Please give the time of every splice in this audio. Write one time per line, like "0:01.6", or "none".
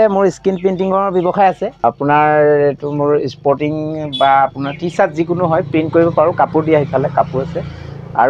0:01.7